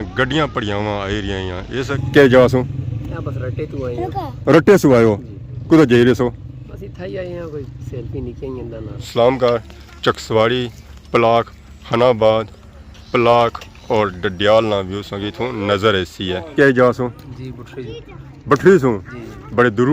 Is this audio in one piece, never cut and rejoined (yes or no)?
no